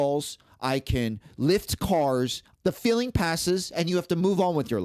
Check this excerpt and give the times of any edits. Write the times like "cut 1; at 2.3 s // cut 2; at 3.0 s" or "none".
cut 1; at 2.4 s